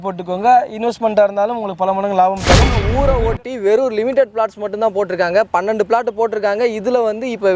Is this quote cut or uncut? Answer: cut